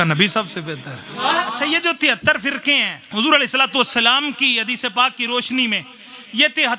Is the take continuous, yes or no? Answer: no